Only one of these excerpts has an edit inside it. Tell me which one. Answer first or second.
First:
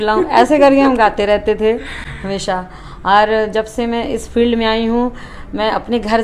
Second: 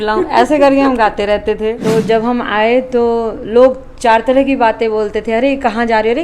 second